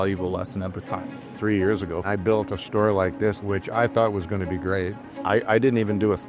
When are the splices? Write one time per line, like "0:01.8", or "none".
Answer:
0:02.0
0:03.4
0:05.0